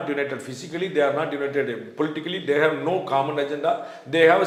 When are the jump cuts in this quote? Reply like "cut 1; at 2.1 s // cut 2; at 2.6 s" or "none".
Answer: none